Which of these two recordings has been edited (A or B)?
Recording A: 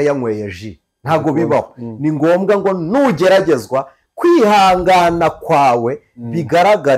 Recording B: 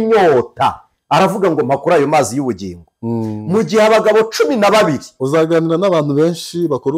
B